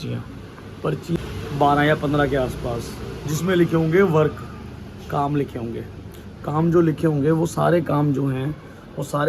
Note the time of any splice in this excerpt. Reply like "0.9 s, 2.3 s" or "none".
1.2 s